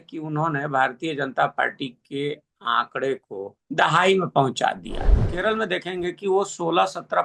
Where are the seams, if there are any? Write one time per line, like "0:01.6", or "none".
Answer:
0:03.6
0:05.3